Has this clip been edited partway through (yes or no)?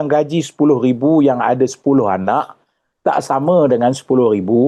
no